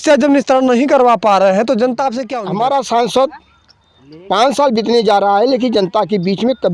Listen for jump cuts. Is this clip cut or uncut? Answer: cut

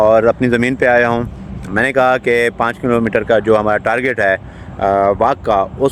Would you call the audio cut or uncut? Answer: uncut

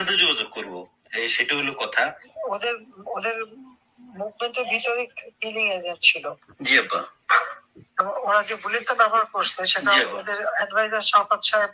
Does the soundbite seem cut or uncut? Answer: cut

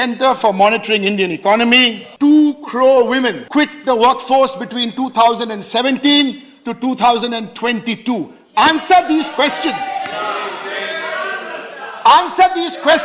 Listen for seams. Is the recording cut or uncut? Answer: cut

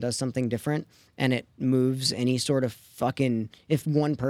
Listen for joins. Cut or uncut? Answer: cut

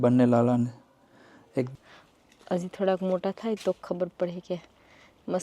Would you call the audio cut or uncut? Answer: cut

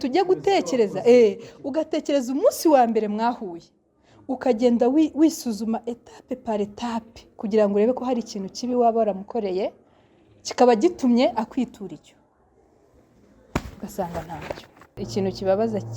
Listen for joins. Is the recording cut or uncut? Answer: cut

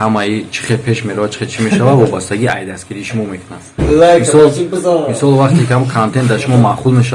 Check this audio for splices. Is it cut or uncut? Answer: uncut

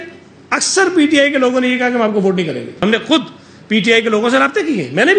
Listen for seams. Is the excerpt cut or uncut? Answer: cut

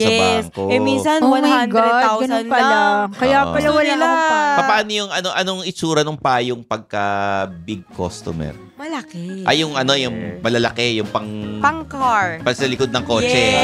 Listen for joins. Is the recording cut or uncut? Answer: uncut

